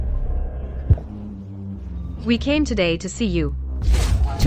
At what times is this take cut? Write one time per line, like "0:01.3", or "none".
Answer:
none

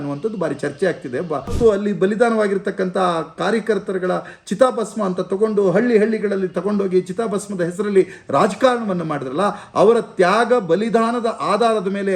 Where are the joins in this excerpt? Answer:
0:01.5

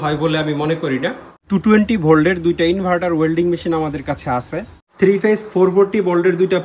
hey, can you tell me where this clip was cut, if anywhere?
0:01.3
0:04.8

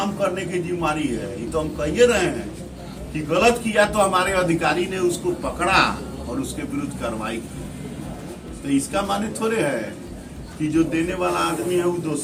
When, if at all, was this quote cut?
none

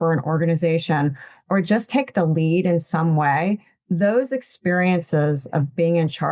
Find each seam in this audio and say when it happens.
none

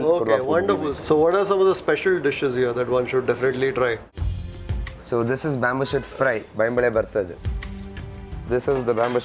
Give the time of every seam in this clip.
0:00.9
0:04.3

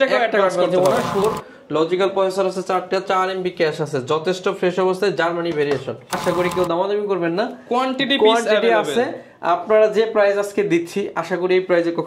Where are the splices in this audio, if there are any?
0:01.2
0:06.2

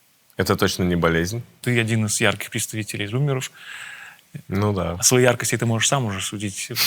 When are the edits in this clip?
0:01.6

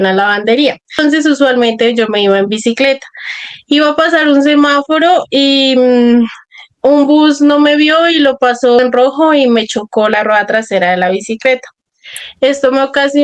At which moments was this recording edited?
0:00.9
0:08.8

